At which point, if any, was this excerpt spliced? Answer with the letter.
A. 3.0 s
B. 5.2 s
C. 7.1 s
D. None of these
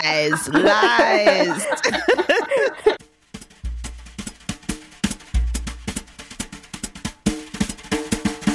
A